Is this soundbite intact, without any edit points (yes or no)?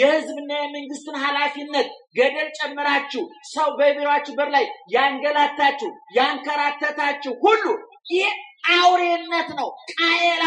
no